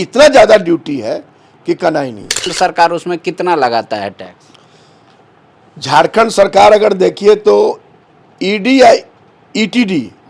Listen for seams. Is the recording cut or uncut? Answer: cut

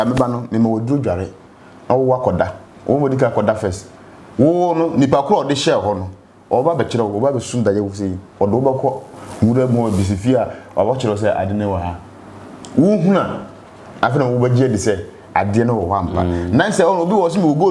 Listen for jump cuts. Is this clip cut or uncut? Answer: uncut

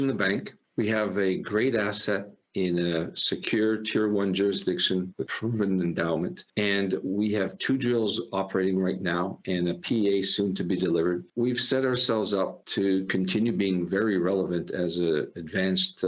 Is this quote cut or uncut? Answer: uncut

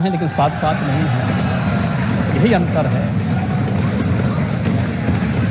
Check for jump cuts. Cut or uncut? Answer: uncut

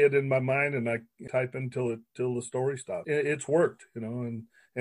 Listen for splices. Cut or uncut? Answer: uncut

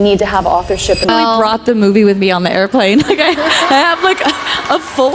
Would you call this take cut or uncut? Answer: cut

